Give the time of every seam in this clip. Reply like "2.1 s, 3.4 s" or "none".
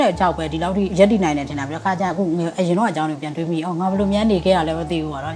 0.9 s